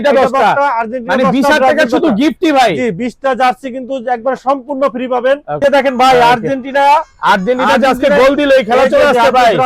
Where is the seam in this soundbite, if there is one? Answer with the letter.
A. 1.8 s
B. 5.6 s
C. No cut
B